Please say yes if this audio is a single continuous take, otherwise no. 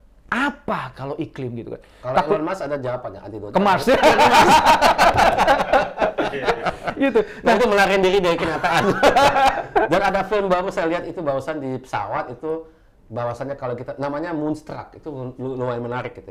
yes